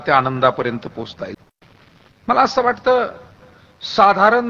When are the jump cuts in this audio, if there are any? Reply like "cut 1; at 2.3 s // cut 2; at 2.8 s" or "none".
cut 1; at 1.3 s